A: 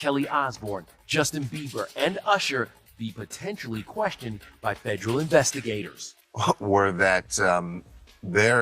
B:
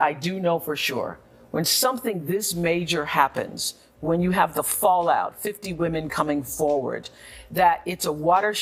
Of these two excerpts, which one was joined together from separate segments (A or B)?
A